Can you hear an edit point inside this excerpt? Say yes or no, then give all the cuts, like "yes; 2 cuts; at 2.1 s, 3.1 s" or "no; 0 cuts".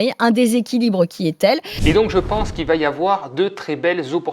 yes; 1 cut; at 1.7 s